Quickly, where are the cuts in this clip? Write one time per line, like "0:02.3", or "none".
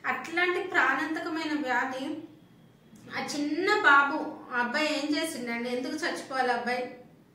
none